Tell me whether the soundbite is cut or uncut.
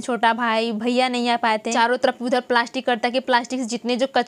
cut